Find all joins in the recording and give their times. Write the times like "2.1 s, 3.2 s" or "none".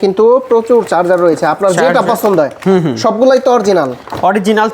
none